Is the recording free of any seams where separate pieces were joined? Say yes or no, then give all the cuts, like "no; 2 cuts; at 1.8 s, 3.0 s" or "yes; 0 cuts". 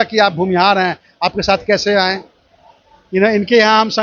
yes; 0 cuts